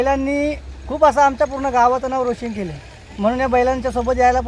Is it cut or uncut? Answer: uncut